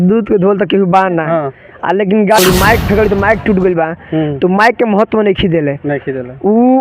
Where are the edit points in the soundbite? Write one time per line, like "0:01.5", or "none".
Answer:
0:02.4